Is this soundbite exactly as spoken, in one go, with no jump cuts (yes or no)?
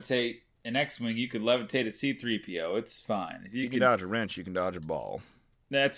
yes